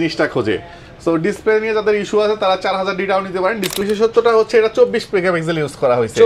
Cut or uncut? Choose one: cut